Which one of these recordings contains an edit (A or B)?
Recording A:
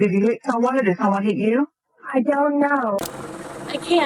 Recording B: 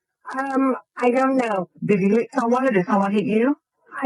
A